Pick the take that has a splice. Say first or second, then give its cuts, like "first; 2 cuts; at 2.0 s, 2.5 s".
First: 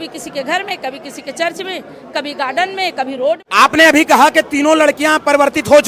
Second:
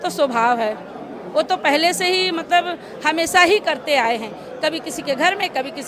first; 1 cut; at 3.4 s